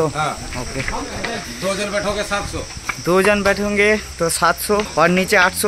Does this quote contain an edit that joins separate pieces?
yes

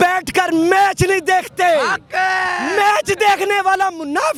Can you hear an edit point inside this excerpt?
no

